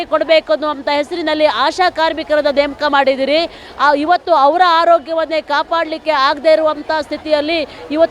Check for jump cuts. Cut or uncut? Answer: uncut